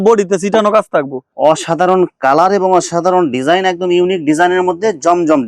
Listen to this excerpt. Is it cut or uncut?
cut